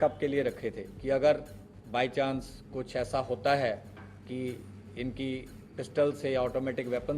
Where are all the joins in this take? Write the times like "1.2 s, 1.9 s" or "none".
none